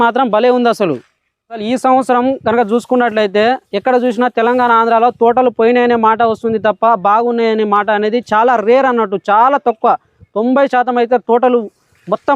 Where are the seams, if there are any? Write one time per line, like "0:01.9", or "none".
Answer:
0:01.6